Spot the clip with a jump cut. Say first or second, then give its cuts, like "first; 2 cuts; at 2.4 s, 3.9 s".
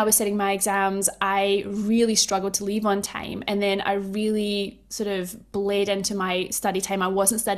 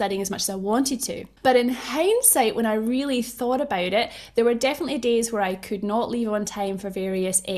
second; 1 cut; at 1.2 s